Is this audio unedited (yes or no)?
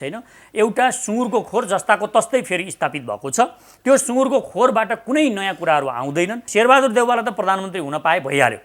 no